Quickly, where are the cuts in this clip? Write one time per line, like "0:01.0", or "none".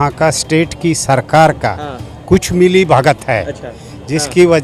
none